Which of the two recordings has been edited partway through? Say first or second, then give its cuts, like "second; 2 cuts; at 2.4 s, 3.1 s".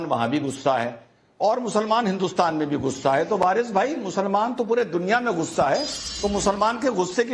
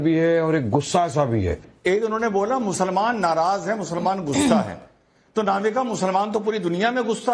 second; 1 cut; at 1.7 s